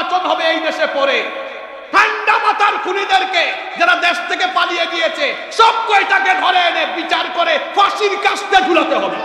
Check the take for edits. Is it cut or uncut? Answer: uncut